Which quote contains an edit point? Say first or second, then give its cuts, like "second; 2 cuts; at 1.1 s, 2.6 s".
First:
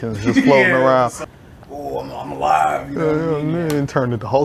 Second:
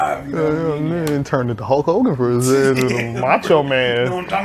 first; 1 cut; at 1.2 s